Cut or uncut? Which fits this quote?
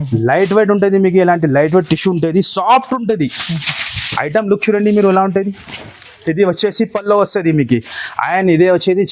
uncut